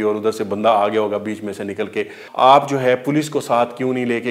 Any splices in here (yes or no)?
yes